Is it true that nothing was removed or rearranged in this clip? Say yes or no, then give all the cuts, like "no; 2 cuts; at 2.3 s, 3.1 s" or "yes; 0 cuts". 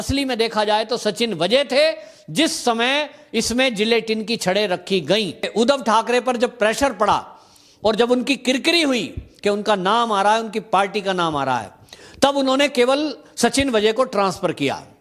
no; 1 cut; at 5.5 s